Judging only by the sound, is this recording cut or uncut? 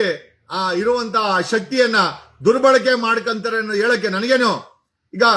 uncut